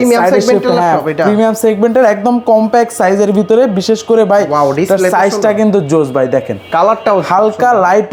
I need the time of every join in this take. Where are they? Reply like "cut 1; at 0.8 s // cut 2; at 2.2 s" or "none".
none